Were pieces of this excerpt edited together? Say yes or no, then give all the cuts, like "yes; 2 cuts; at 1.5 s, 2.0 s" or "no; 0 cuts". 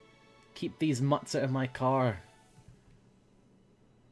no; 0 cuts